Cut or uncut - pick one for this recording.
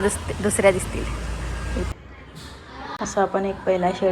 cut